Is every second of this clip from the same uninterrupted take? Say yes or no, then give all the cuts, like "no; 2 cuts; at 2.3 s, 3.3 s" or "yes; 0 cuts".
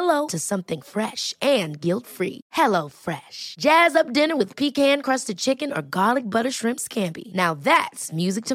yes; 0 cuts